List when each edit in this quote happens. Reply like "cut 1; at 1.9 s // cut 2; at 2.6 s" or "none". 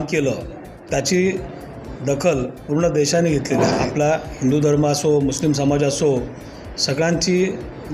cut 1; at 3.5 s

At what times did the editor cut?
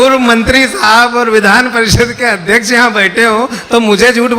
none

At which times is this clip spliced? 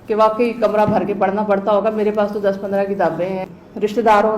cut 1; at 3.4 s

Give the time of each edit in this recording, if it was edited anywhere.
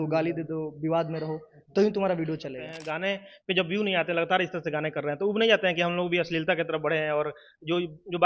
cut 1; at 2.8 s

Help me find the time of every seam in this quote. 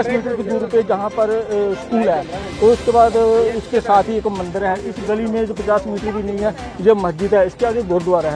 none

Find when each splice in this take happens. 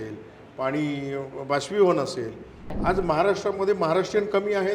cut 1; at 2.7 s

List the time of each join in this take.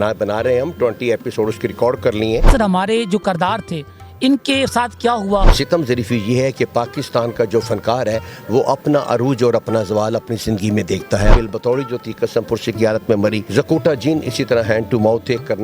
cut 1; at 2.5 s // cut 2; at 5.6 s // cut 3; at 11.3 s // cut 4; at 13.4 s

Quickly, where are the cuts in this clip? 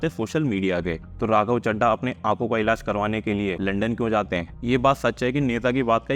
cut 1; at 1.1 s // cut 2; at 3.6 s // cut 3; at 4.5 s

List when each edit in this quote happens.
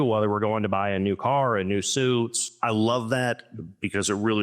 cut 1; at 2.5 s

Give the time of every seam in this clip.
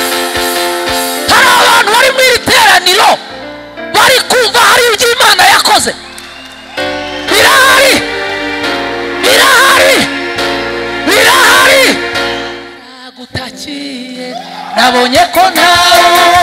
cut 1; at 12.8 s

